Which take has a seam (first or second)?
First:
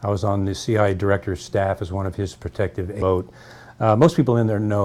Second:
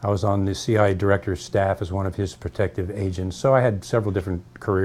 second